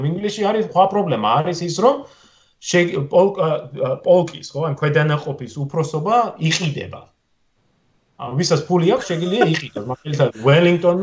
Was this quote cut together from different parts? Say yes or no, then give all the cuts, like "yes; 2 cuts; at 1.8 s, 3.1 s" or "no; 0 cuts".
no; 0 cuts